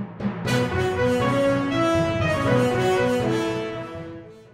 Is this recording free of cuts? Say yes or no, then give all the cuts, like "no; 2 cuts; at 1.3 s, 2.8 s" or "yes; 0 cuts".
no; 1 cut; at 3.5 s